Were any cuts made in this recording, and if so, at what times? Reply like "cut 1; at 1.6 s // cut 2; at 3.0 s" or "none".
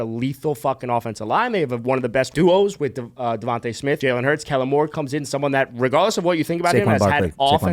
cut 1; at 2.3 s // cut 2; at 4.0 s